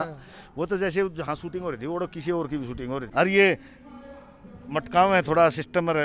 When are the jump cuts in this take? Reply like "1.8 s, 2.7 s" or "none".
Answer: 3.1 s